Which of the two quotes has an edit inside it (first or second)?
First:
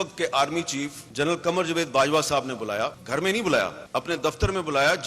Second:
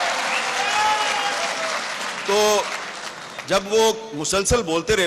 first